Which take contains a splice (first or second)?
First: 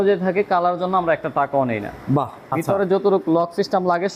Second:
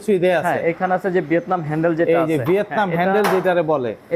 first